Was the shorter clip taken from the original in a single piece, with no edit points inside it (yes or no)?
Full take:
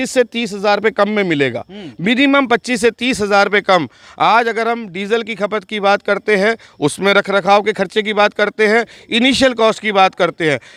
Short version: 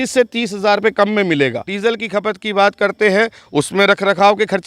no